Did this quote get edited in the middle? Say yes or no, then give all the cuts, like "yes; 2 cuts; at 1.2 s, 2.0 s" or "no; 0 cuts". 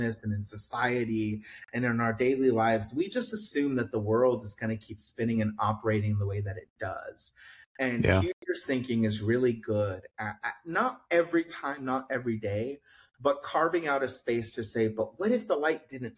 no; 0 cuts